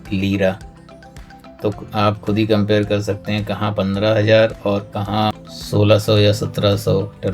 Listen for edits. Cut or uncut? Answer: cut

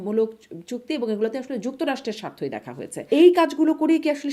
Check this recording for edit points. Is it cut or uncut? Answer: cut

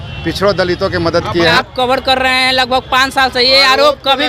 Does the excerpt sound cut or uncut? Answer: cut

